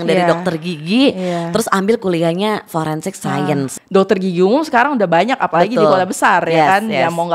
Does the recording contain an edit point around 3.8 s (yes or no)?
yes